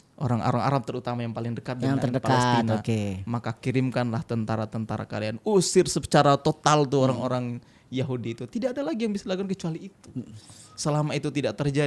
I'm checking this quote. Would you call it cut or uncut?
uncut